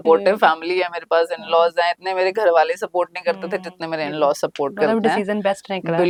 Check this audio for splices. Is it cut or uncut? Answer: uncut